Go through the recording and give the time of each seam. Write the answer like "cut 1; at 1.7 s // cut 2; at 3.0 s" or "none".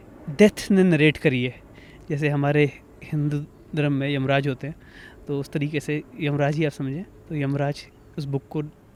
none